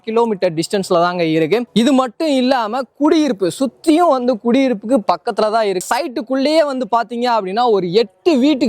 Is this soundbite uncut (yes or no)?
yes